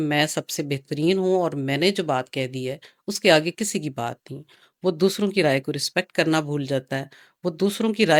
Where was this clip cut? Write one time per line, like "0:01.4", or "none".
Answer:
none